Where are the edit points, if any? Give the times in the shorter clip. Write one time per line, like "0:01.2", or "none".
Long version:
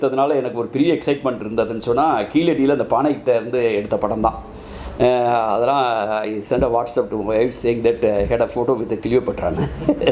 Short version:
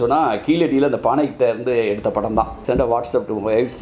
0:02.6